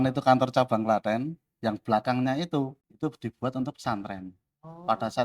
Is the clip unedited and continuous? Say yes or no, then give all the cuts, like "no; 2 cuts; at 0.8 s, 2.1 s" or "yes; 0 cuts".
no; 1 cut; at 2.8 s